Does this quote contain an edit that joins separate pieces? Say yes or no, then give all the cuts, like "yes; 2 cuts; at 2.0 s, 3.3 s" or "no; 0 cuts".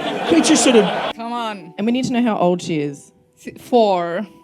yes; 1 cut; at 1.1 s